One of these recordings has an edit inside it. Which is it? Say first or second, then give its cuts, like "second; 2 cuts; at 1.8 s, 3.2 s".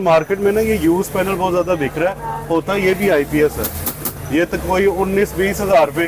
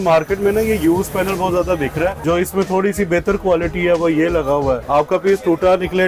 second; 2 cuts; at 2.2 s, 4.8 s